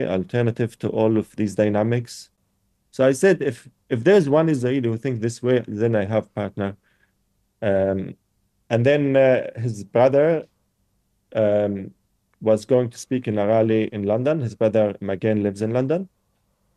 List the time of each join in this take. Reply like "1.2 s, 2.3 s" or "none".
2.4 s